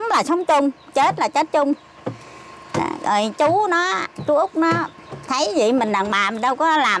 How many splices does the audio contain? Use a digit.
0